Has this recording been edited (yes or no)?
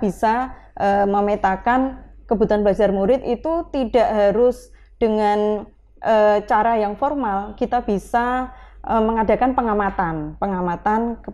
no